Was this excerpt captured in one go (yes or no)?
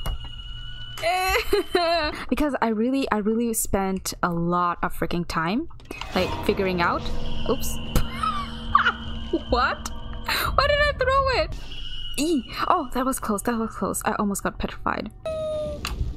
no